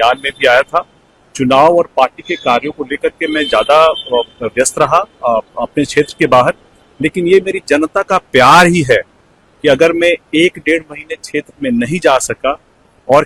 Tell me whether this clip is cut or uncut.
uncut